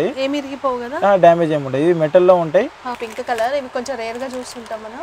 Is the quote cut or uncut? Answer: cut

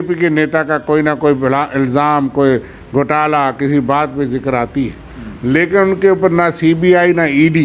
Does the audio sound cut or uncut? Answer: uncut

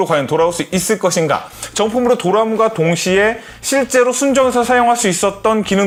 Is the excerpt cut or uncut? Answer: uncut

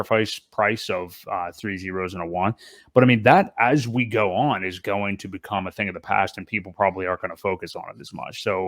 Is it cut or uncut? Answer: uncut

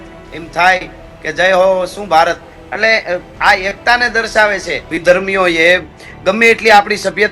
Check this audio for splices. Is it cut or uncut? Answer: cut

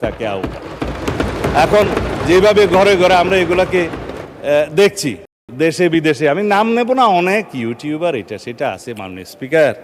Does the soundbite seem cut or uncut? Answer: uncut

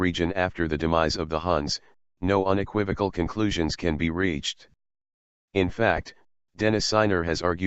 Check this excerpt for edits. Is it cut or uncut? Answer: uncut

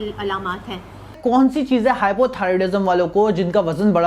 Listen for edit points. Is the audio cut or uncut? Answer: cut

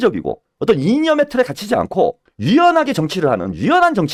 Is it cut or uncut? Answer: uncut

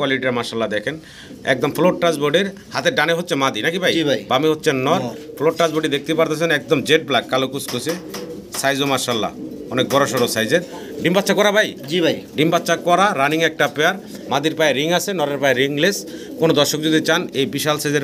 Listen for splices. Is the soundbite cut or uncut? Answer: uncut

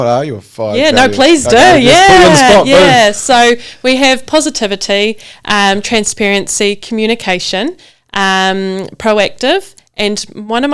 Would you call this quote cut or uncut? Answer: uncut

